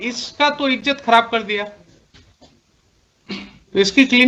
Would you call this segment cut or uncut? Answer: uncut